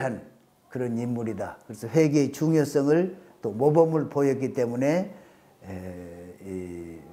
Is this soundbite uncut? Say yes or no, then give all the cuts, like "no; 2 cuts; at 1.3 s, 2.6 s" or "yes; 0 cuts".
yes; 0 cuts